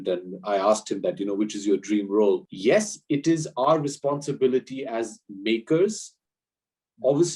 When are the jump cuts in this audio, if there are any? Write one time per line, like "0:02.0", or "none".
0:02.5